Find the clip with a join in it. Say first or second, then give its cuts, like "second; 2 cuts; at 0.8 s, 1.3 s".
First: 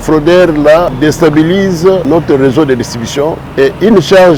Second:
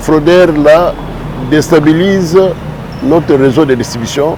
first; 3 cuts; at 0.9 s, 2.0 s, 3.4 s